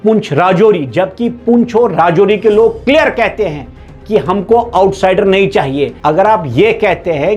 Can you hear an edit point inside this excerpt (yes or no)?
yes